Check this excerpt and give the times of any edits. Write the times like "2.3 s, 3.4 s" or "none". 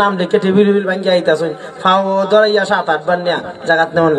none